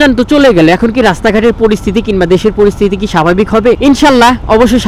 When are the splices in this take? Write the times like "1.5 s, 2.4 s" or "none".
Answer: none